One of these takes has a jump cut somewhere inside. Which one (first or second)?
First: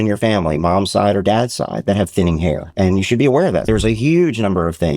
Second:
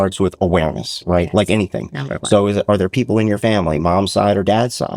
first